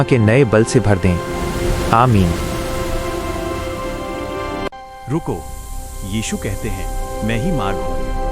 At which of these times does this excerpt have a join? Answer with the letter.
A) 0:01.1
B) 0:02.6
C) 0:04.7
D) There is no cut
C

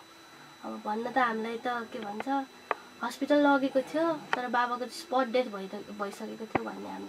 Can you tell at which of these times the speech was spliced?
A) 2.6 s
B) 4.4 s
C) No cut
C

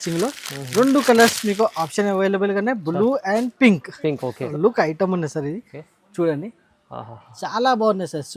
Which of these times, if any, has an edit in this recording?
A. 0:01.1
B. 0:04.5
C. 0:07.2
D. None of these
B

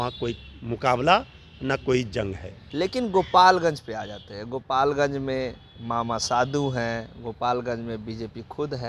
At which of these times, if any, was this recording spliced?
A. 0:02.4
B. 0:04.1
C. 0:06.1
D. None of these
D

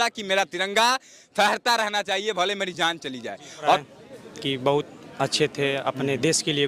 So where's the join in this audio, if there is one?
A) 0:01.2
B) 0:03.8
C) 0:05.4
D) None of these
B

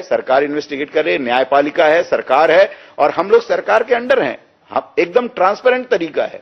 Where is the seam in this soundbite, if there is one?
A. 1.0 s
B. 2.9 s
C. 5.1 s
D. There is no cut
D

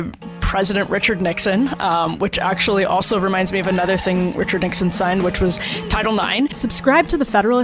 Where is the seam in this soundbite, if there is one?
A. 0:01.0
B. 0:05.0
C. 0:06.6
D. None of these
C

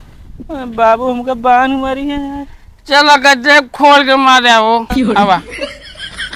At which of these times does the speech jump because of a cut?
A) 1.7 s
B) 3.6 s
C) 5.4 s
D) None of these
C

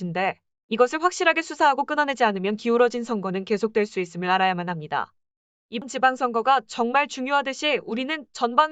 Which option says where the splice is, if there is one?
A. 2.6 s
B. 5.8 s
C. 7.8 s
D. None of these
B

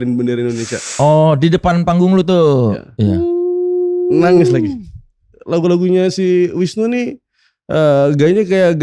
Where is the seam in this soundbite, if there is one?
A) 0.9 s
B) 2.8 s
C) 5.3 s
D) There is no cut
C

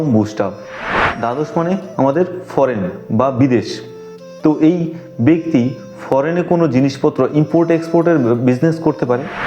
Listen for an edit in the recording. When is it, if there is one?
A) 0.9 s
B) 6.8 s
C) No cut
A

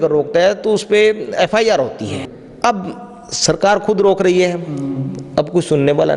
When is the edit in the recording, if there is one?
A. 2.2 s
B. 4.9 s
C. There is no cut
A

